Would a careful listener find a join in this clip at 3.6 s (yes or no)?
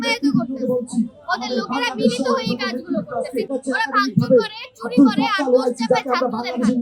yes